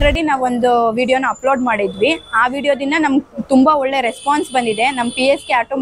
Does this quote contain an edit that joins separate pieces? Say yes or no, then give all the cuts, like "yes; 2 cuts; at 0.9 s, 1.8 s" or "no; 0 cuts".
no; 0 cuts